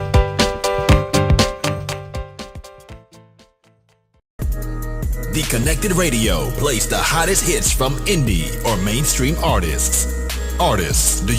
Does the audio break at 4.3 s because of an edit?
yes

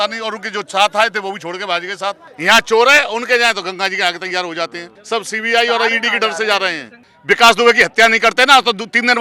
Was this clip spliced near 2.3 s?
yes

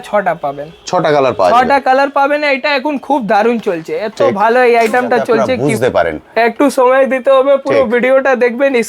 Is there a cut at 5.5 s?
yes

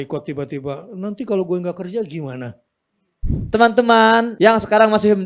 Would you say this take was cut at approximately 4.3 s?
yes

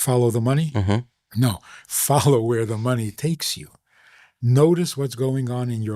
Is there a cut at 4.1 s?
no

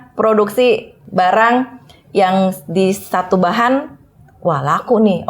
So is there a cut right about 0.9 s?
yes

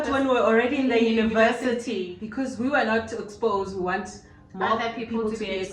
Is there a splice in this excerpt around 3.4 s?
no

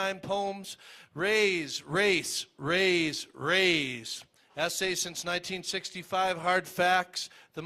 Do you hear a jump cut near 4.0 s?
yes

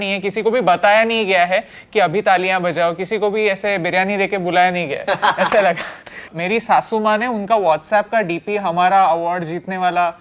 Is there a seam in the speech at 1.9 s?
no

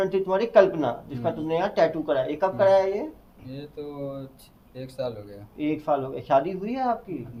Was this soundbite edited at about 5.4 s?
no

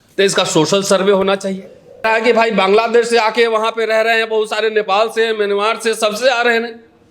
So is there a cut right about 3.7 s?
no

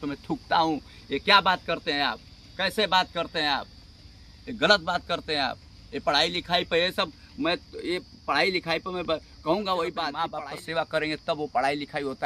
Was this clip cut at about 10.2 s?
yes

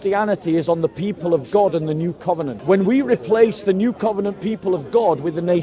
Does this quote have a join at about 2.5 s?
yes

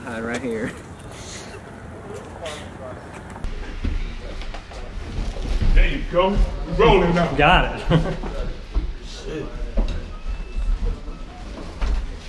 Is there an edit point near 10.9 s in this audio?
no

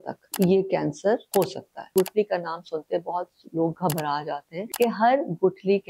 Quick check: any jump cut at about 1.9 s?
yes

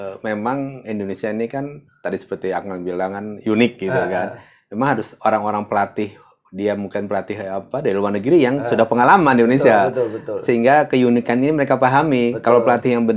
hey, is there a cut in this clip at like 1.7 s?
no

